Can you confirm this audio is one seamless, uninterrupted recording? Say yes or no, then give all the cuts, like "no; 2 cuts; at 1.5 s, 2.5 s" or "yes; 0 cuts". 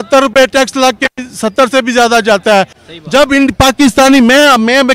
no; 1 cut; at 2.8 s